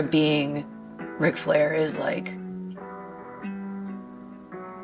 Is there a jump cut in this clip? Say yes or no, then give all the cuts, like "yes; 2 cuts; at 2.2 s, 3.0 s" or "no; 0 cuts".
no; 0 cuts